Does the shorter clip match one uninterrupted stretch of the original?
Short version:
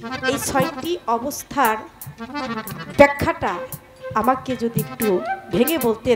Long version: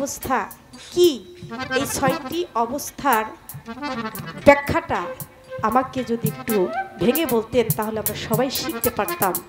yes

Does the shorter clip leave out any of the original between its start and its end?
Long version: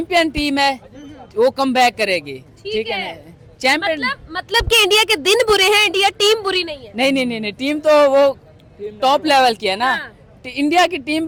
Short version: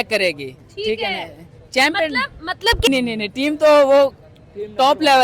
yes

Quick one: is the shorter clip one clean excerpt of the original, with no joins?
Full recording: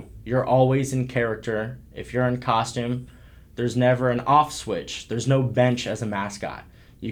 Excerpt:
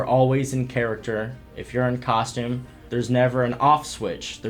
no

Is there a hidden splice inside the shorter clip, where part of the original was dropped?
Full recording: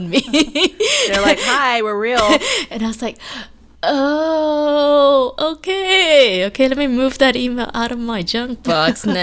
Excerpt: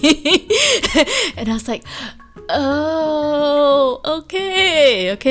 yes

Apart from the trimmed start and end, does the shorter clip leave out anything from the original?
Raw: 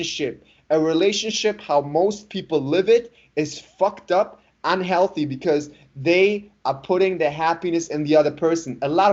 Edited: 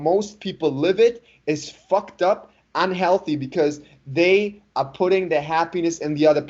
no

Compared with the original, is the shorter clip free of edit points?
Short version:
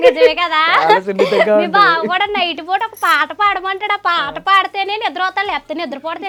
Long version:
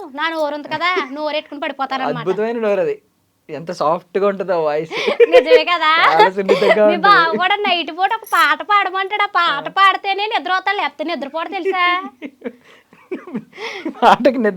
yes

